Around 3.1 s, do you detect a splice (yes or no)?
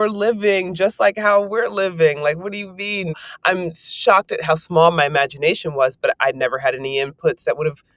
yes